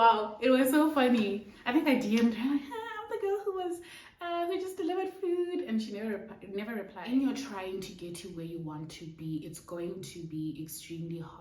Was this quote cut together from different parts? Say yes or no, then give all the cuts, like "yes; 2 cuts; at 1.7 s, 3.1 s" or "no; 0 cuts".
yes; 1 cut; at 6.9 s